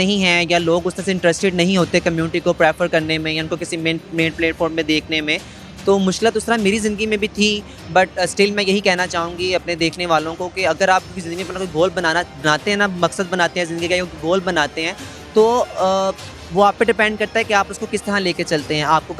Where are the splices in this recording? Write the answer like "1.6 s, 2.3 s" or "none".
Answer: none